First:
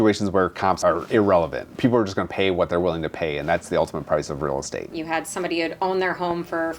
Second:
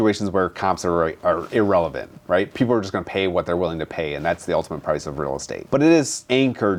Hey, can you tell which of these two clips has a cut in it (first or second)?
first